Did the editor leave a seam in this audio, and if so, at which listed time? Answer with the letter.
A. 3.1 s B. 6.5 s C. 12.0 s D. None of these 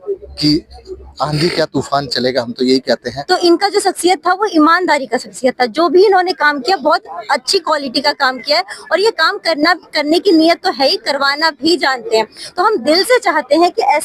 A